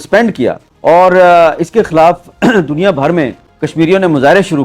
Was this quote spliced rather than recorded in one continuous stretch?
no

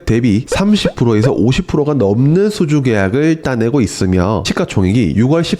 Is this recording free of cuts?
no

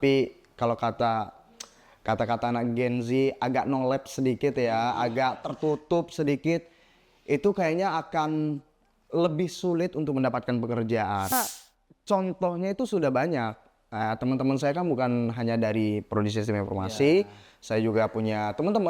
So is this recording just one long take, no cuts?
no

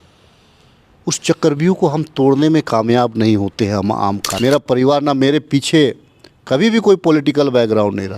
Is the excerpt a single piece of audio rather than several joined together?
no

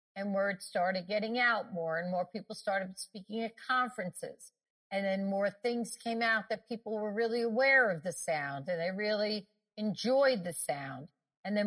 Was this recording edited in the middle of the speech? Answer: no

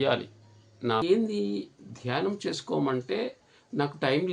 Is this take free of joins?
no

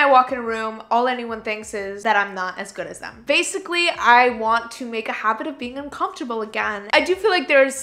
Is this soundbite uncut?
no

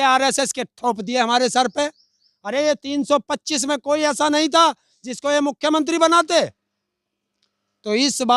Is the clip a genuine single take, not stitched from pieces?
yes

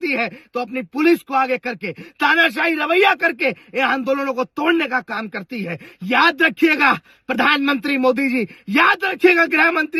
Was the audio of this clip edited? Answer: no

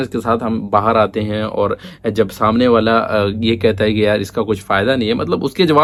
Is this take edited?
no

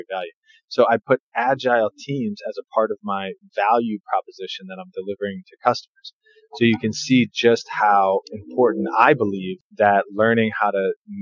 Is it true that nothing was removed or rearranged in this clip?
yes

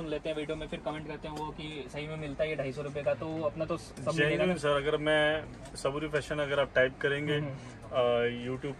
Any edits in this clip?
no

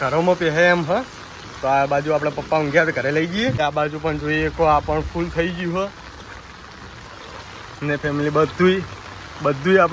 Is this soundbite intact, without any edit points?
yes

